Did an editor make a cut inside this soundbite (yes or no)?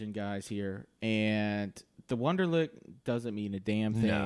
no